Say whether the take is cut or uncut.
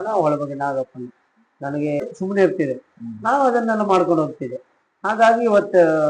cut